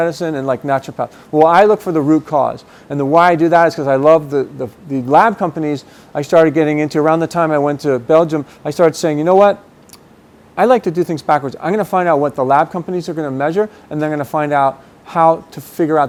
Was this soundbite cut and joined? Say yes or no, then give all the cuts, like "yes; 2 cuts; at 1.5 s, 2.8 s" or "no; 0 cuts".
no; 0 cuts